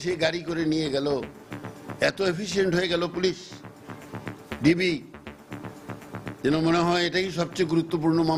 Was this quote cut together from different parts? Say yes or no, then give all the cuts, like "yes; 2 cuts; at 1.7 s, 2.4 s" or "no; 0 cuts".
no; 0 cuts